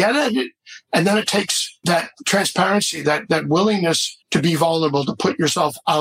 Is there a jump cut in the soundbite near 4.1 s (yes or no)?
yes